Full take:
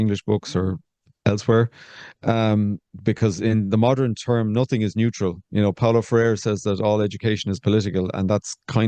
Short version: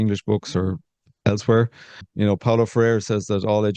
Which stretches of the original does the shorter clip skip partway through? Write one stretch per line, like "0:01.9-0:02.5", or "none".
0:02.1-0:05.4